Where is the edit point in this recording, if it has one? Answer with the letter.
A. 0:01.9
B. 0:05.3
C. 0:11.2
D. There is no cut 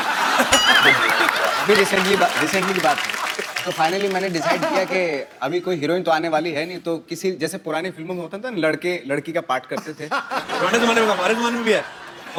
D